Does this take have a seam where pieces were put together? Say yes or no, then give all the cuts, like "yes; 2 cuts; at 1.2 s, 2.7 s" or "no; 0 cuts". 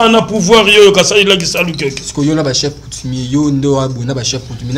no; 0 cuts